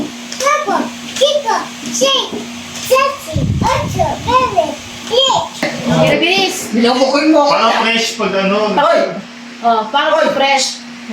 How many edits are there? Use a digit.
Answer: 1